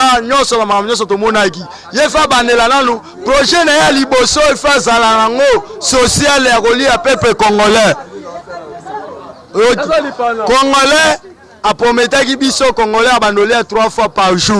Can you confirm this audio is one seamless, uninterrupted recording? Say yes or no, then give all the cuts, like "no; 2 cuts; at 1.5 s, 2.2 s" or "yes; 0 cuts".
yes; 0 cuts